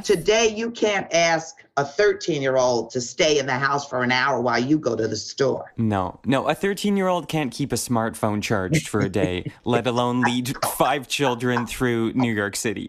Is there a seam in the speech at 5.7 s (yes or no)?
yes